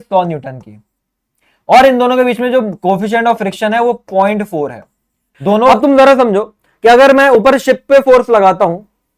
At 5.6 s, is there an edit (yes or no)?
yes